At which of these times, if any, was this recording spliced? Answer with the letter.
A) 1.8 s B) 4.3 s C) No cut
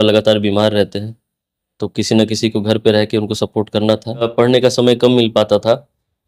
B